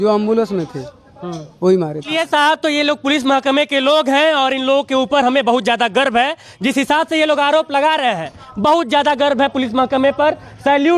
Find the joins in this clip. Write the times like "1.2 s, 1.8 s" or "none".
2.1 s